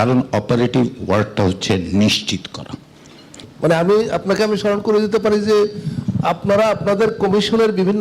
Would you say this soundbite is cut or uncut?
cut